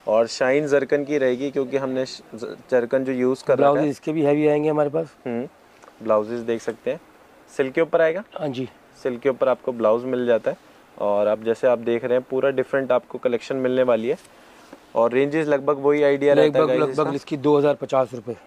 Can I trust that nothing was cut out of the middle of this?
yes; 0 cuts

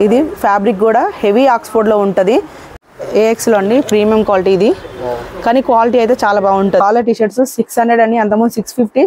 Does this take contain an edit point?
yes; 2 cuts; at 2.6 s, 6.8 s

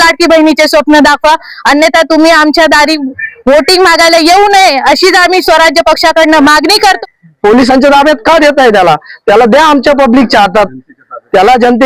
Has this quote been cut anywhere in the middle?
yes; 1 cut; at 7.0 s

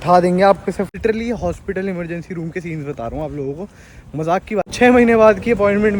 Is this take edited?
yes; 2 cuts; at 1.0 s, 4.7 s

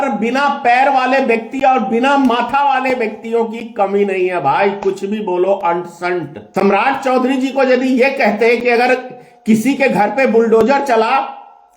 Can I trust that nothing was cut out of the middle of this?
no; 1 cut; at 6.4 s

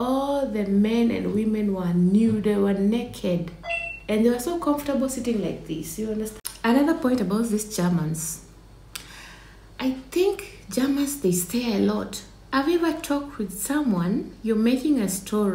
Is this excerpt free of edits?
no; 1 cut; at 6.4 s

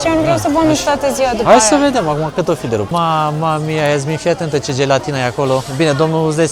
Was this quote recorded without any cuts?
no; 1 cut; at 2.9 s

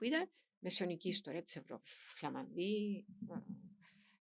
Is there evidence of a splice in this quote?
no; 0 cuts

